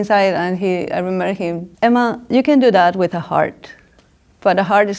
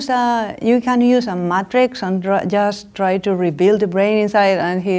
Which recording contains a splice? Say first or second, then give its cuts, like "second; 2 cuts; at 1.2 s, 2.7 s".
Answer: first; 1 cut; at 1.7 s